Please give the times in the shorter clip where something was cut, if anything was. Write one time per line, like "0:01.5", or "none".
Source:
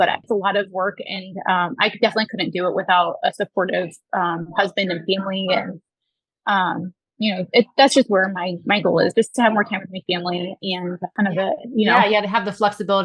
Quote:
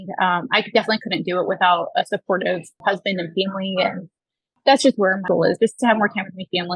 0:02.7
0:04.6
0:05.2